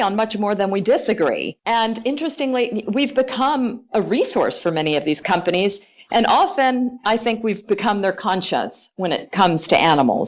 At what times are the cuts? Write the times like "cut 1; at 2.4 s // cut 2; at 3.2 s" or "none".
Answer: cut 1; at 1.5 s // cut 2; at 5.2 s